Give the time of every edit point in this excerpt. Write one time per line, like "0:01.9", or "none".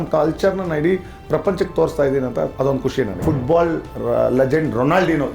0:03.2